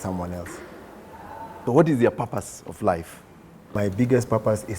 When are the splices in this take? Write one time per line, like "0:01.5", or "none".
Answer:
0:01.6
0:03.7